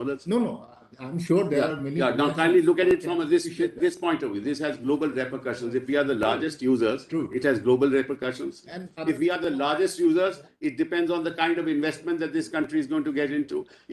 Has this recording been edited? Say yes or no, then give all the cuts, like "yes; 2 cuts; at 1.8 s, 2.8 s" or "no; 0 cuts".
no; 0 cuts